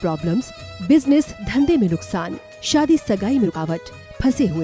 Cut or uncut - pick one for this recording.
cut